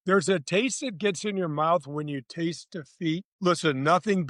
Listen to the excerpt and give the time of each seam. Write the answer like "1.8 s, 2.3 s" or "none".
3.3 s